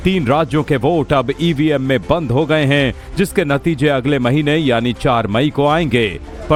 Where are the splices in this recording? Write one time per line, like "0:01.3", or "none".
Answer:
none